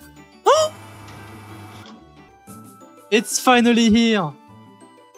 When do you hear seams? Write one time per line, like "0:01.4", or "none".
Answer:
0:02.3